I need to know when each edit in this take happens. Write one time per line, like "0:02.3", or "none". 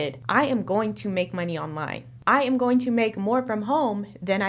0:02.2